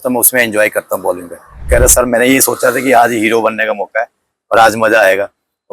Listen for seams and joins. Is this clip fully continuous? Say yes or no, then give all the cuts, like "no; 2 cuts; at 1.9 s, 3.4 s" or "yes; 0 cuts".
no; 1 cut; at 1.7 s